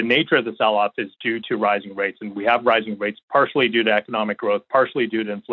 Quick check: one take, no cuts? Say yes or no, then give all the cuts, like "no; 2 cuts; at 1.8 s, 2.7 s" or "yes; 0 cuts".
no; 2 cuts; at 1.1 s, 3.2 s